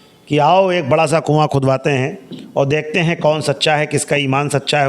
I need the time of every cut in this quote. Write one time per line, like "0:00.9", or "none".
none